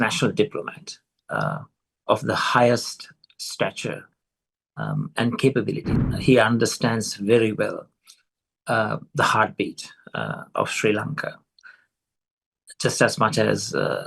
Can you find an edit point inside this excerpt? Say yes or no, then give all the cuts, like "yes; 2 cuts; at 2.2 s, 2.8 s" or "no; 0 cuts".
yes; 1 cut; at 5.9 s